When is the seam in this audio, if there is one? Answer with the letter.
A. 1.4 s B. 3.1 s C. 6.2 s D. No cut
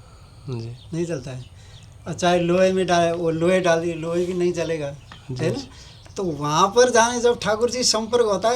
D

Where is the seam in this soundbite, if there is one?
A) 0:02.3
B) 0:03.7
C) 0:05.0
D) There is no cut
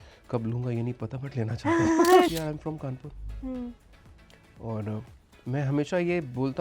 A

